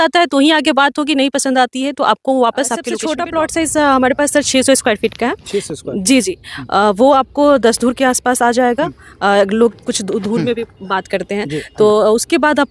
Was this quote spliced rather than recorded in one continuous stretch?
yes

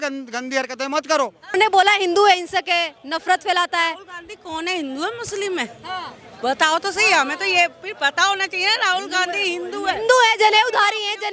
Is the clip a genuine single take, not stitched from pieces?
no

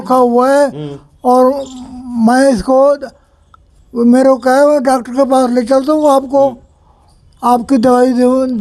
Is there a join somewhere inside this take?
no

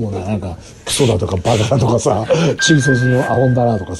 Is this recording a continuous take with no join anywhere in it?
yes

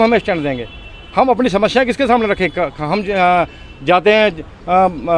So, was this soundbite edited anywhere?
no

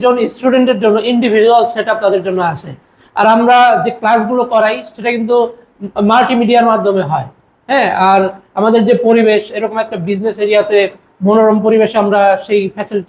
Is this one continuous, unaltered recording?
yes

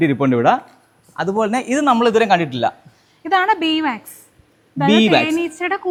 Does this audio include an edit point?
no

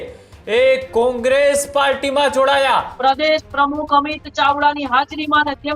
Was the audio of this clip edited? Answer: yes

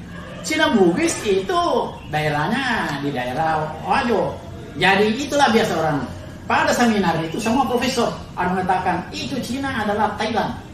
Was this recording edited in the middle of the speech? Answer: no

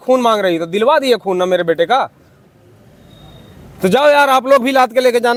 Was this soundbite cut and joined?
no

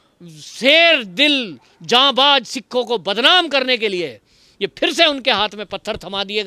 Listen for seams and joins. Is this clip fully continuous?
yes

